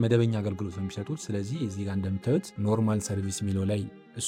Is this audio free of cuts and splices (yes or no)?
yes